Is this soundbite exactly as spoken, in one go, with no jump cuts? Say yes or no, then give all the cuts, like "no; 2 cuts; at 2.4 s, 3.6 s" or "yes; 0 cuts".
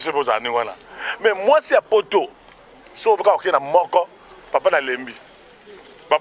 yes; 0 cuts